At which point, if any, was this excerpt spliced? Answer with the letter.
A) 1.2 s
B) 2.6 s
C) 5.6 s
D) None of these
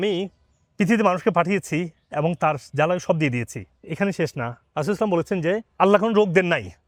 D